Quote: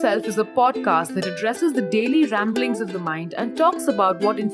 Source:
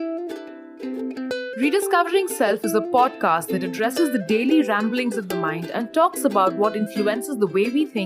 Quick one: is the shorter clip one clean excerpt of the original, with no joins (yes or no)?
yes